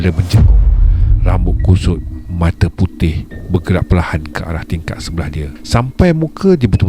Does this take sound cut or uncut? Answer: cut